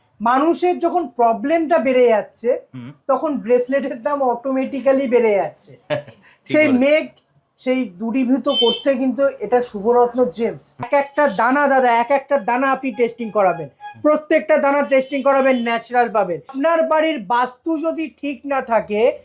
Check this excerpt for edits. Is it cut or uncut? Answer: cut